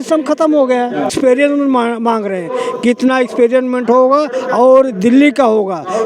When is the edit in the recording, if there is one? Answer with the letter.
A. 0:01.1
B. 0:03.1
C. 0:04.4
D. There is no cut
A